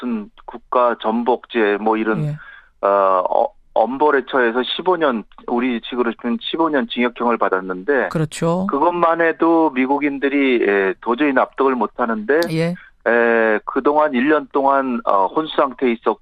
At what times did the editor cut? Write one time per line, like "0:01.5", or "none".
0:15.3